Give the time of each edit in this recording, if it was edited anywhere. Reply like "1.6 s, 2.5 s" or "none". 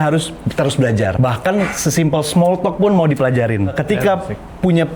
1.1 s, 3.8 s